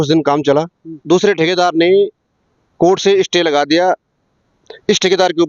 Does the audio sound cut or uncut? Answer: cut